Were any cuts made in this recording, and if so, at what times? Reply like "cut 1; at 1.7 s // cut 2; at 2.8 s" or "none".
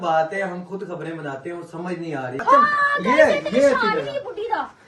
cut 1; at 2.4 s